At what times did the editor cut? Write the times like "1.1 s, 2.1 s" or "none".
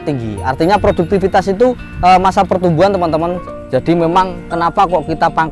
3.4 s